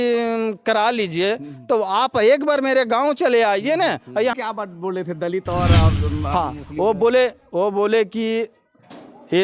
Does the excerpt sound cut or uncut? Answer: cut